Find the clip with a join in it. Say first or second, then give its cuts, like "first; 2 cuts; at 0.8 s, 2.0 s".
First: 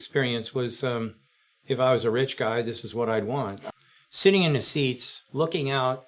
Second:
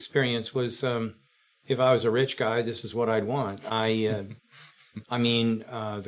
first; 1 cut; at 3.6 s